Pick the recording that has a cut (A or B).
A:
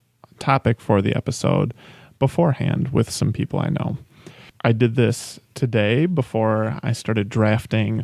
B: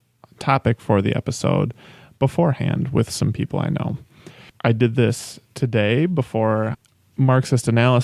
A